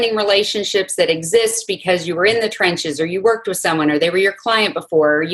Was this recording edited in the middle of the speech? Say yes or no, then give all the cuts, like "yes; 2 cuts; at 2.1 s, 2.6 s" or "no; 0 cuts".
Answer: no; 0 cuts